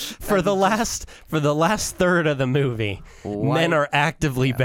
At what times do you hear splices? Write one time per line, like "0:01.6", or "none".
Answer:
none